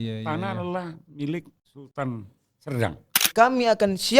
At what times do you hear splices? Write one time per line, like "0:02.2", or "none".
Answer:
0:03.3